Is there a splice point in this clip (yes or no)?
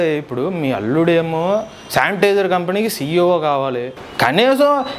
yes